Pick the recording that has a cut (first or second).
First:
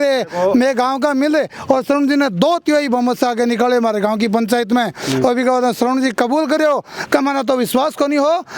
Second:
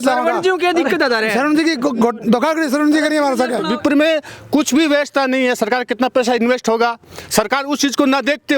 second